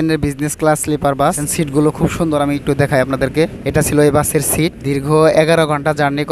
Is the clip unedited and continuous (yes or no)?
no